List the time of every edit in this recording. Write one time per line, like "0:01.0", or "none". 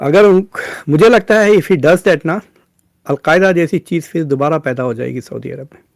none